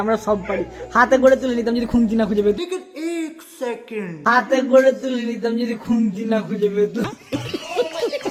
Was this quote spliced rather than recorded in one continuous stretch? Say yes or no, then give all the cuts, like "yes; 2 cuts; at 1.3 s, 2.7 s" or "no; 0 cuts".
no; 0 cuts